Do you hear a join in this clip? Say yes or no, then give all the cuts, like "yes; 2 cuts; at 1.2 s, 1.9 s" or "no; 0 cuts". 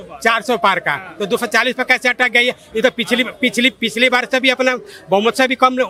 no; 0 cuts